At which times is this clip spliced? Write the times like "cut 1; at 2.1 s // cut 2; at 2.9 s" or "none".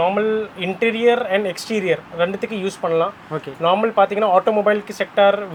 none